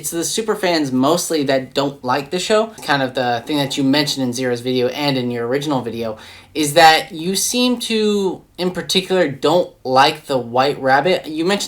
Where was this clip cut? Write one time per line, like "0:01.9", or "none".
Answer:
0:02.8